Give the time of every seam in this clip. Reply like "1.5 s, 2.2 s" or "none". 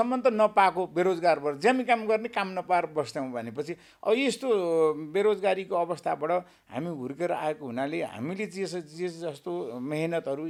none